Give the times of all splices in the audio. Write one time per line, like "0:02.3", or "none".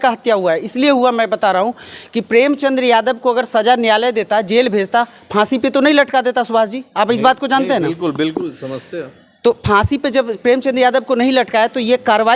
none